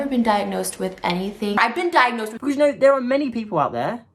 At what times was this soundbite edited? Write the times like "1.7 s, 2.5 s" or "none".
2.3 s